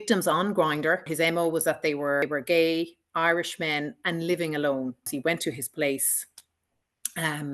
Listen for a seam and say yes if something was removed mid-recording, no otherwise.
yes